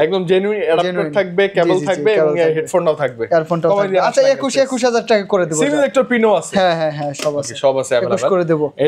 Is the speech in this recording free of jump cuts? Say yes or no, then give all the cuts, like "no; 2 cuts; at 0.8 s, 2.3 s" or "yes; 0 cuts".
yes; 0 cuts